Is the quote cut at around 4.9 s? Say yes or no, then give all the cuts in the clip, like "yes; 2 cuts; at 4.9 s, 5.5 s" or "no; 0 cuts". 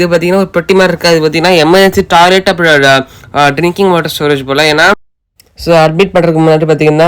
yes; 1 cut; at 4.9 s